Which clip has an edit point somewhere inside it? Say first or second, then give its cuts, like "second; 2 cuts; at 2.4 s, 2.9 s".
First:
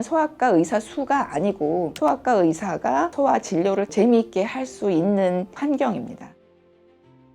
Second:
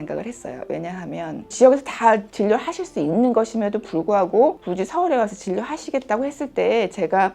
first; 1 cut; at 6.3 s